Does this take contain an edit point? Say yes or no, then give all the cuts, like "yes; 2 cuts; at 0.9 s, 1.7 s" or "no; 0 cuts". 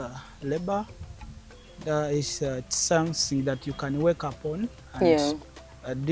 no; 0 cuts